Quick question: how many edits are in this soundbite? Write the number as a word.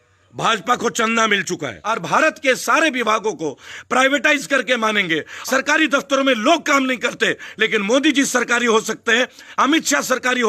two